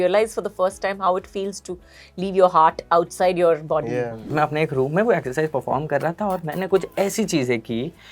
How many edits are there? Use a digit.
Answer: 1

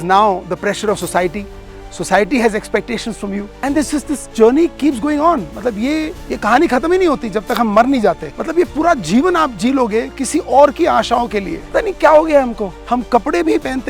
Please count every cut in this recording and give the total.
5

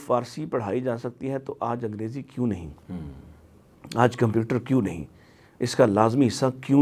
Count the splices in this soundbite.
0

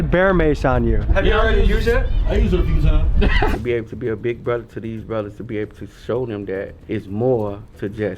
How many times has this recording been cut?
3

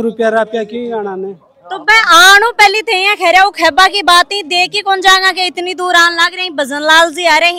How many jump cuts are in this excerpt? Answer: 0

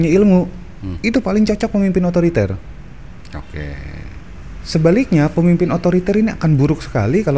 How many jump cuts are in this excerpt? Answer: 0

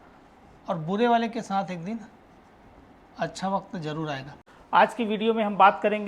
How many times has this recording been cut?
1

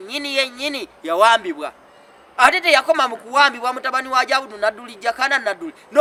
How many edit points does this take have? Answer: 0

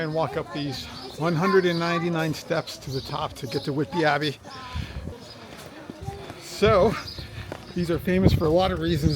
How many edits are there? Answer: 1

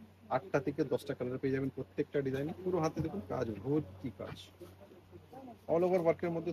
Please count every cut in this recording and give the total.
1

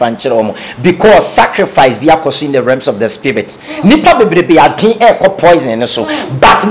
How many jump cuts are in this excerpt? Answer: 0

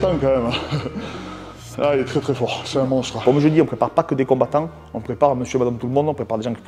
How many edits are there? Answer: 1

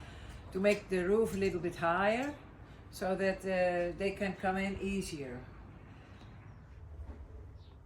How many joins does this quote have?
1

